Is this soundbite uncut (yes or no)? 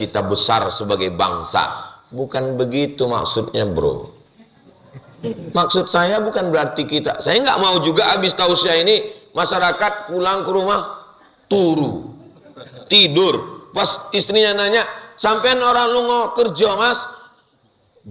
yes